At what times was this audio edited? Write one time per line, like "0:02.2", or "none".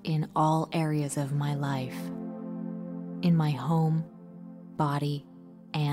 none